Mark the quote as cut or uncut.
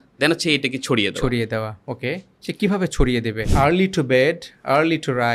cut